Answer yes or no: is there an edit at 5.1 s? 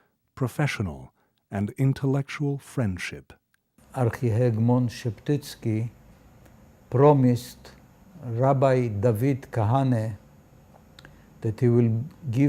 yes